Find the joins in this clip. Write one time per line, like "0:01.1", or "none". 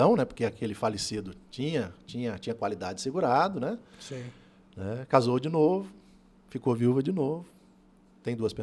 none